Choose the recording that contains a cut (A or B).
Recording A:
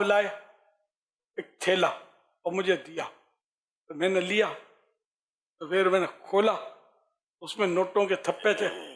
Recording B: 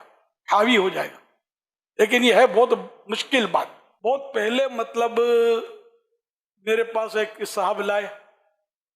B